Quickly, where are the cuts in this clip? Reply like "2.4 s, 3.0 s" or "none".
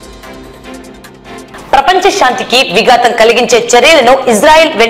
1.3 s

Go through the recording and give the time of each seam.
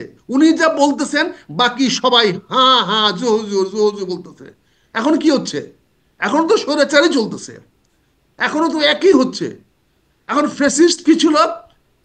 none

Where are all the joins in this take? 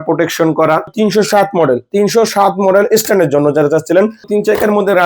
0.9 s, 4.3 s

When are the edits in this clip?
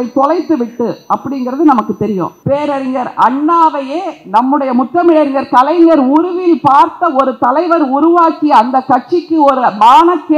2.3 s

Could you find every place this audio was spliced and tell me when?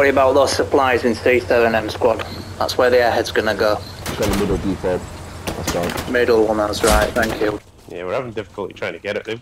4.0 s, 7.6 s

